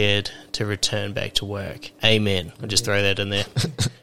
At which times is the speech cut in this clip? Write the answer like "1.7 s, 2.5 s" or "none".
1.8 s, 2.6 s